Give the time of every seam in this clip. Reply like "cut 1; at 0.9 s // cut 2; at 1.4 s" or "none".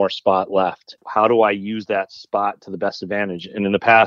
cut 1; at 0.9 s